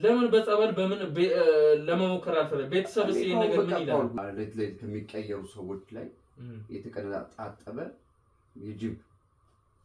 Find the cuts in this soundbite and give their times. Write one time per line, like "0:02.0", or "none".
0:04.2